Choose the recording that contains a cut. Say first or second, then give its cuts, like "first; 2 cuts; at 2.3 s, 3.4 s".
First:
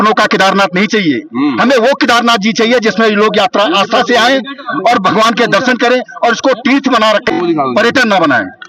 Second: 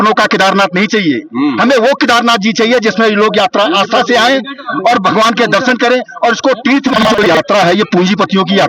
second; 1 cut; at 7.1 s